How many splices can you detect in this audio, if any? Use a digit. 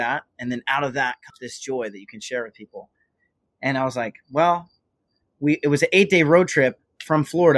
1